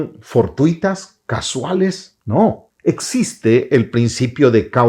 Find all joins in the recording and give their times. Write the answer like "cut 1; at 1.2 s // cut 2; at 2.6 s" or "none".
cut 1; at 2.1 s // cut 2; at 2.7 s